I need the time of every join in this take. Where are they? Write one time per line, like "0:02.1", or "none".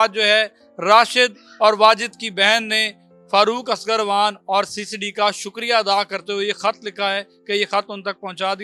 none